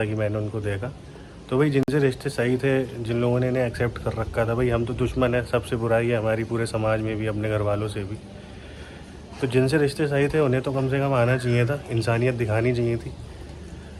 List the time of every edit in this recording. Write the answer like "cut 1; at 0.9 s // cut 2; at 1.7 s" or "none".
none

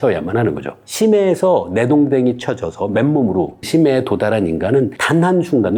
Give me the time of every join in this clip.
none

